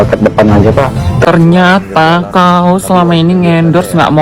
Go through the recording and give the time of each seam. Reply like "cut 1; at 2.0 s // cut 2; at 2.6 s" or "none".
cut 1; at 1.3 s